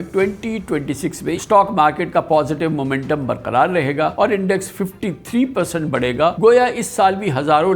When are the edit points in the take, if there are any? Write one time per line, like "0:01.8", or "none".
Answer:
0:01.4
0:04.1
0:06.4